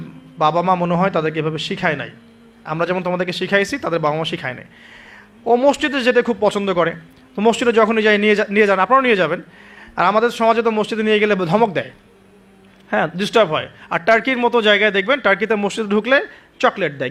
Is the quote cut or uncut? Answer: uncut